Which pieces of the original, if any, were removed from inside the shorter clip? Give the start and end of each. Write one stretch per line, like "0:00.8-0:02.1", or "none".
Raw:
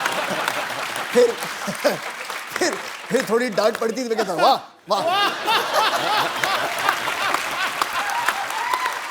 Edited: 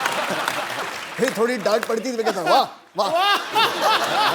0:00.9-0:02.8